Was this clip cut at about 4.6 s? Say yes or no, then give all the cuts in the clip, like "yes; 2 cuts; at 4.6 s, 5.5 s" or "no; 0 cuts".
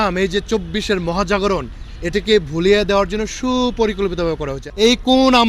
yes; 1 cut; at 4.6 s